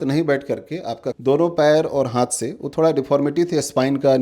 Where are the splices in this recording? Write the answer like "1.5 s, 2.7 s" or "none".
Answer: 1.1 s